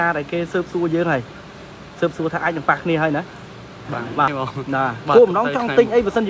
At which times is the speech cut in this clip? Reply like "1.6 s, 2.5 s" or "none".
4.3 s